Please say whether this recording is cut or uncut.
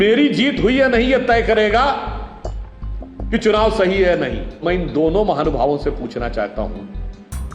cut